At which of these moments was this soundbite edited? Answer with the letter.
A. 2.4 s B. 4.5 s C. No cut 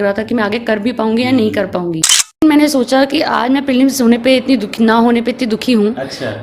A